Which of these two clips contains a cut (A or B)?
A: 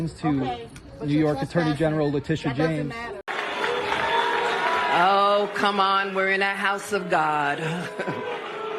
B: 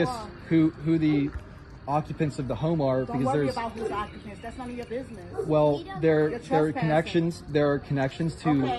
A